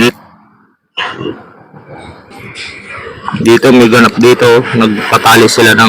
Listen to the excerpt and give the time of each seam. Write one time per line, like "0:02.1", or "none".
0:02.3